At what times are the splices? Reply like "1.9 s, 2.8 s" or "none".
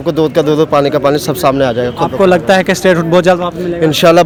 none